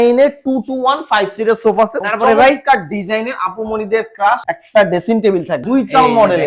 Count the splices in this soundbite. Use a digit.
2